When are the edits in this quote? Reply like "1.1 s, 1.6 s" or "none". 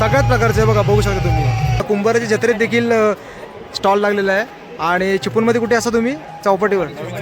1.8 s